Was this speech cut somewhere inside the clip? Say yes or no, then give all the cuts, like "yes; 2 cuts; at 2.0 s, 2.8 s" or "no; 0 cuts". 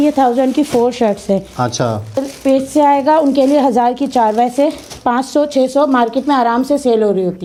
no; 0 cuts